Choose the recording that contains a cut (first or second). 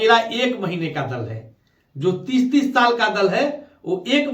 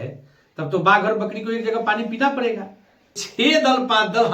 second